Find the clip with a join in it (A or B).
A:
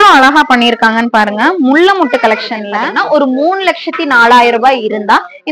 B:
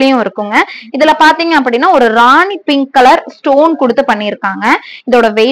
A